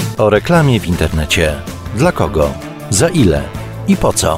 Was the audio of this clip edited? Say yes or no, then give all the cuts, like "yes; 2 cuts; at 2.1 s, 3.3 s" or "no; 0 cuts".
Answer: no; 0 cuts